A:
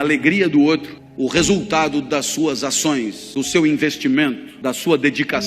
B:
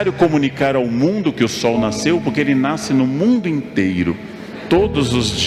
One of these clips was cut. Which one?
A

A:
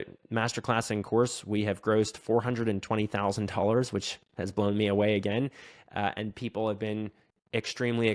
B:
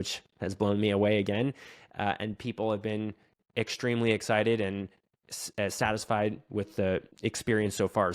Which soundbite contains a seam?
B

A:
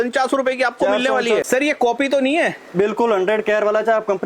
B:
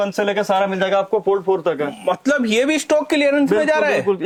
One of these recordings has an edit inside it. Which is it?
A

